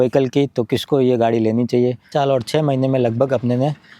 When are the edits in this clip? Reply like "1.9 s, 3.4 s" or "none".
2.1 s